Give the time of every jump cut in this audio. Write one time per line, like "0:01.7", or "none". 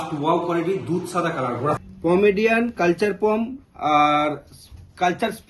0:01.8